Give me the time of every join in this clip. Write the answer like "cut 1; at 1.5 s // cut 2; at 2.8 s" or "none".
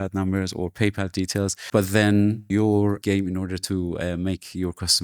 cut 1; at 1.6 s // cut 2; at 2.8 s